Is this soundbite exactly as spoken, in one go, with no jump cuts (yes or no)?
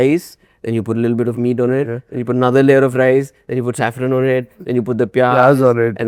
yes